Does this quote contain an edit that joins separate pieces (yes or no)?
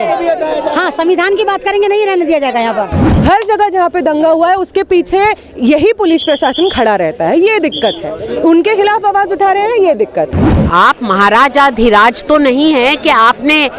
yes